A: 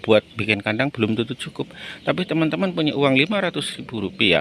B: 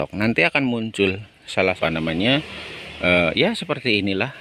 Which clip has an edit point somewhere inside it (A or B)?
B